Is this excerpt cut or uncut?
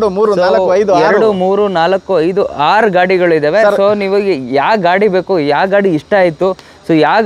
uncut